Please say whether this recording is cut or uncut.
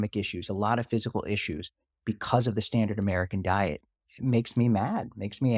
uncut